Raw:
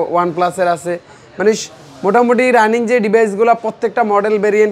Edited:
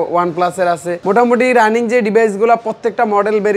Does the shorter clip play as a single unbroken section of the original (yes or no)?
no